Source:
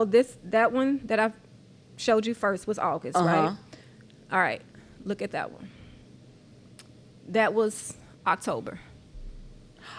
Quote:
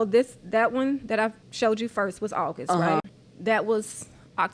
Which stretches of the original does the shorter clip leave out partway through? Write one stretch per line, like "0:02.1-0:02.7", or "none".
0:01.4-0:01.9
0:03.6-0:07.1